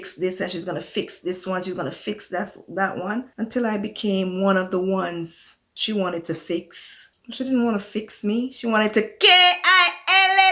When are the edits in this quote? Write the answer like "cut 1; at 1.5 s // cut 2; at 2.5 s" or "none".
cut 1; at 3.3 s